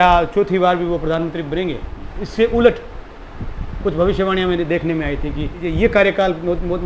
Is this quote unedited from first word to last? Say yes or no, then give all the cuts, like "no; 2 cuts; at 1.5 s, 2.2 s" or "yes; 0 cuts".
no; 2 cuts; at 2.0 s, 5.7 s